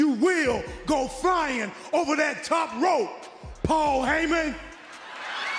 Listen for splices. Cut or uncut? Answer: uncut